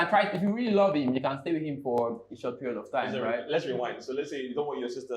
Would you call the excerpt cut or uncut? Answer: uncut